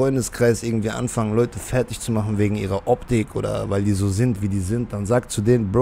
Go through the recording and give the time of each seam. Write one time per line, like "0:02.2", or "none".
none